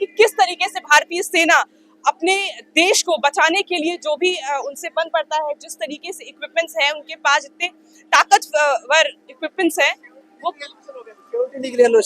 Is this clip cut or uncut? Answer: uncut